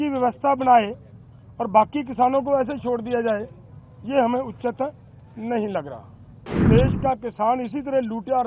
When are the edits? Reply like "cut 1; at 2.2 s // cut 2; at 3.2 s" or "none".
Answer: cut 1; at 6.6 s